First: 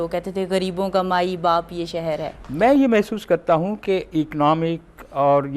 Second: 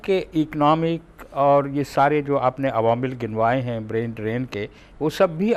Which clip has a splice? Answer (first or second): first